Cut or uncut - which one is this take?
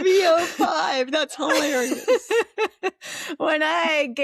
uncut